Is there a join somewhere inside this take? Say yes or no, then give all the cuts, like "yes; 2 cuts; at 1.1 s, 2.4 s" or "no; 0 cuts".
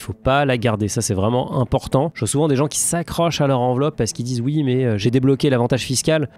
yes; 1 cut; at 5.0 s